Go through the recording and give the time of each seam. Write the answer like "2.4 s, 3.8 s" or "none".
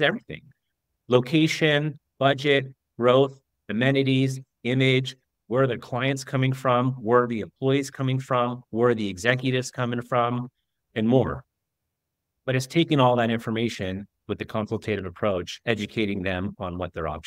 14.1 s, 15.5 s